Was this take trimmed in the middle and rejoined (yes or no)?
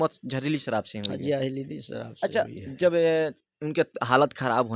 no